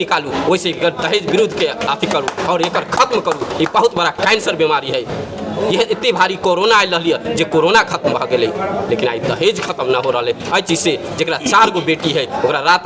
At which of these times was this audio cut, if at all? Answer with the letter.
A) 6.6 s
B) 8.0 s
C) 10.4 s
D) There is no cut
D